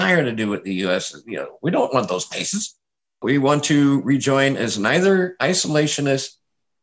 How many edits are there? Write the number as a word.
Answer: one